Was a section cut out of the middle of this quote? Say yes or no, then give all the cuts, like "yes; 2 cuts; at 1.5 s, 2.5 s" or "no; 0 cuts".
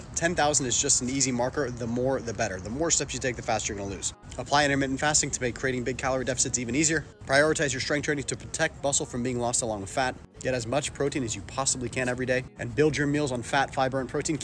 yes; 4 cuts; at 4.1 s, 7.1 s, 10.3 s, 12.2 s